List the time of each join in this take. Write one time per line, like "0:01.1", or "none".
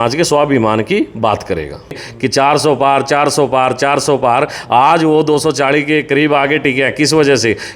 0:02.1